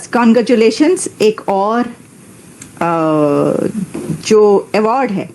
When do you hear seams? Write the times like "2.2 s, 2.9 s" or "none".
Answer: none